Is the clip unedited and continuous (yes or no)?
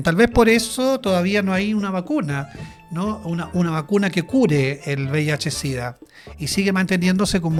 yes